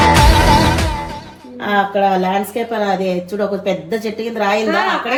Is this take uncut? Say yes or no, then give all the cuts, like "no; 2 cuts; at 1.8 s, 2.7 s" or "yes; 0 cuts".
yes; 0 cuts